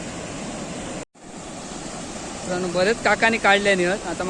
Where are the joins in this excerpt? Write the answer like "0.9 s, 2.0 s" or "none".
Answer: none